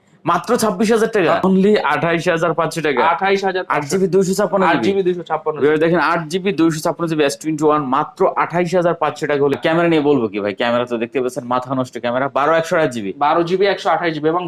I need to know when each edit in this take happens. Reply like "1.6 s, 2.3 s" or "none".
1.4 s, 9.6 s